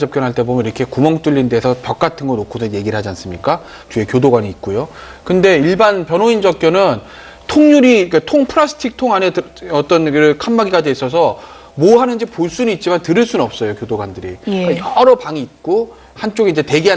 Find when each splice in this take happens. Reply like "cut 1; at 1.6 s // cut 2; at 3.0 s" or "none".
none